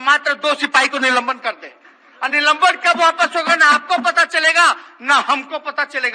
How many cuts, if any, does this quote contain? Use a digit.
0